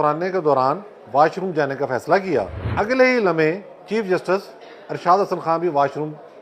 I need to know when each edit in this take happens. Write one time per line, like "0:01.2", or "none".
0:02.6